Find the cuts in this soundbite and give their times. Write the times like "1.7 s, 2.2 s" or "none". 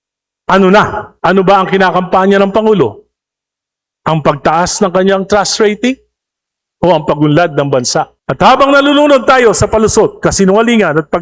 1.0 s, 8.2 s